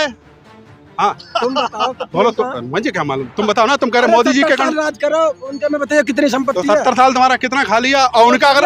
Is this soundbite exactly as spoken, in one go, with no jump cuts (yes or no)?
yes